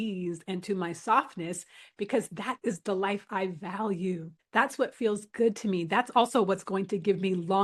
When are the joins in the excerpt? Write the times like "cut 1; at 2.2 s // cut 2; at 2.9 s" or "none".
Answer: none

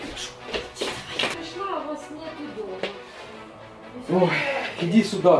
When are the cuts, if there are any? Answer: cut 1; at 1.4 s

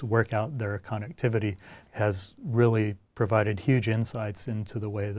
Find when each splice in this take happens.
none

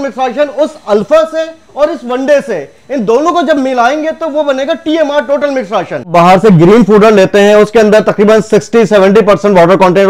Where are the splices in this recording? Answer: cut 1; at 6.0 s

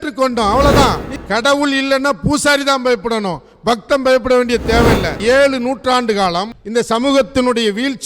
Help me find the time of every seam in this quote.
cut 1; at 1.1 s // cut 2; at 5.1 s

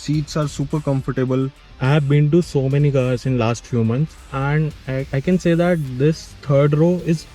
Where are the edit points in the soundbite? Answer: cut 1; at 1.6 s

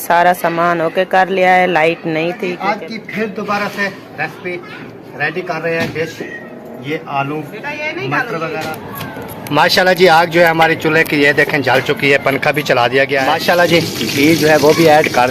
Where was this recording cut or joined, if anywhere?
cut 1; at 2.5 s // cut 2; at 8.8 s // cut 3; at 13.2 s

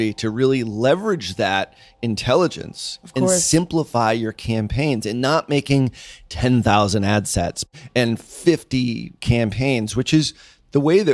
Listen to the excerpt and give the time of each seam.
cut 1; at 7.7 s

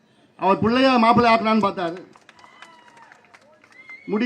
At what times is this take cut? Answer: none

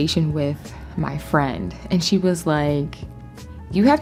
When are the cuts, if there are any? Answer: none

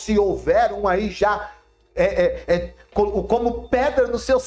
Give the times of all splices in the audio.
none

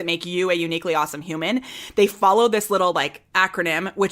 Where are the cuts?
cut 1; at 3.2 s

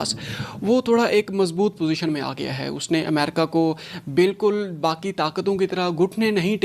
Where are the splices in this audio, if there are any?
none

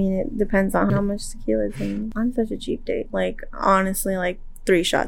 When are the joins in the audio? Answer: cut 1; at 0.9 s // cut 2; at 2.1 s

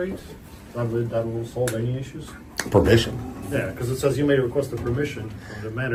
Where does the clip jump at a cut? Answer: none

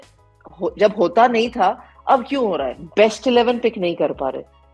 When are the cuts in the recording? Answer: cut 1; at 2.8 s

